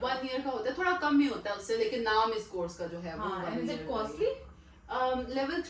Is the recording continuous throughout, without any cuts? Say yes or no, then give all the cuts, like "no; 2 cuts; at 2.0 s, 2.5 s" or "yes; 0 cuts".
yes; 0 cuts